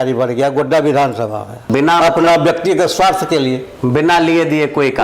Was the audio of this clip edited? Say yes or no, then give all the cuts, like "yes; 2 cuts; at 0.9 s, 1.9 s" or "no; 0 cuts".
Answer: yes; 1 cut; at 1.6 s